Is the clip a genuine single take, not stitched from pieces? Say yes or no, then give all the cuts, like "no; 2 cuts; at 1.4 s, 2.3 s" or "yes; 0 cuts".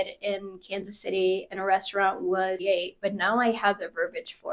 no; 1 cut; at 2.6 s